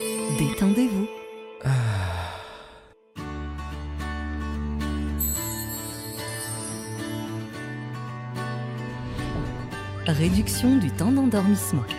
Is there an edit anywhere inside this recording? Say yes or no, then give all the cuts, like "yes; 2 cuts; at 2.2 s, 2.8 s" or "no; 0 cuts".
no; 0 cuts